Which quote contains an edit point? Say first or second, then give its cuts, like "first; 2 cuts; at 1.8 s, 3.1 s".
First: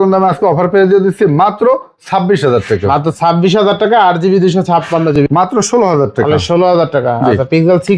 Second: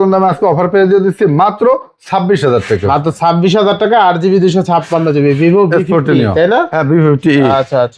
first; 1 cut; at 5.1 s